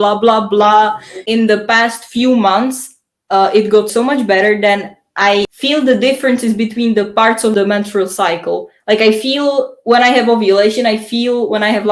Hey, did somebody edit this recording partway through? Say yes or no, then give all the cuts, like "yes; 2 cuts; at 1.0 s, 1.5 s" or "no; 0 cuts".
yes; 4 cuts; at 1.2 s, 3.9 s, 5.5 s, 7.5 s